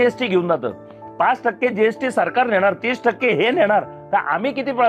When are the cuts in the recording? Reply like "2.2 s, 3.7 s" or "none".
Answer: none